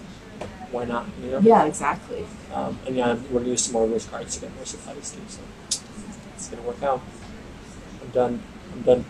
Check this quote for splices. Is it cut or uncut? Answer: uncut